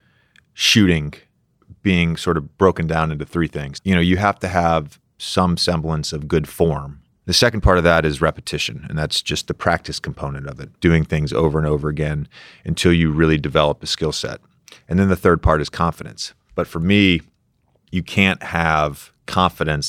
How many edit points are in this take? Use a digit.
1